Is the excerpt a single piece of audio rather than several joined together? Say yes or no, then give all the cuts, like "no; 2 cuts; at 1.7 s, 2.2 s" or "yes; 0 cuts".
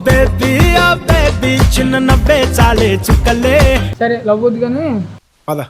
no; 1 cut; at 3.9 s